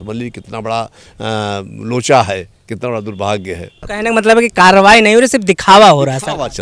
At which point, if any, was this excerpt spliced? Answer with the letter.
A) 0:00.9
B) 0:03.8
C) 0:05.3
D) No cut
B